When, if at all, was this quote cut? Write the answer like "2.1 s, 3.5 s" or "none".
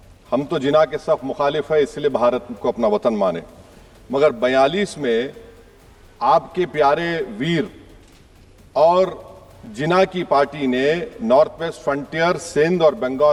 none